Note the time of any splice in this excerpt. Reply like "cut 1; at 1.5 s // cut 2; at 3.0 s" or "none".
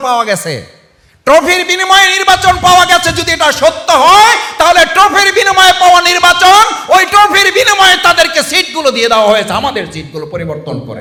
none